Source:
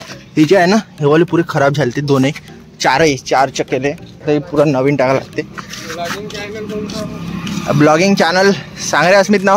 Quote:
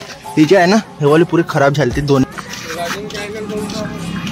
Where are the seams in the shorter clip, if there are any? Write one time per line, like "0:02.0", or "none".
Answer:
0:02.2